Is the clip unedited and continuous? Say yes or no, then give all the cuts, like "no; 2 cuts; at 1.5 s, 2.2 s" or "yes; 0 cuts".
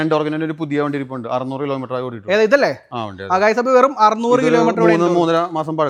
yes; 0 cuts